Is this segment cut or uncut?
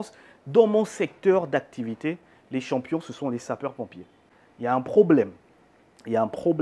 uncut